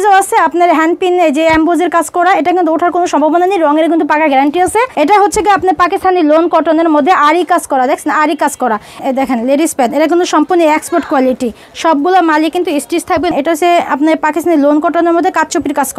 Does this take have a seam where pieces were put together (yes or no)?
yes